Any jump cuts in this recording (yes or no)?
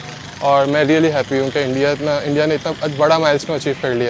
no